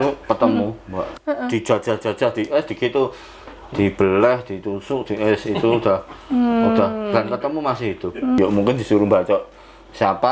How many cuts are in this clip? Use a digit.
2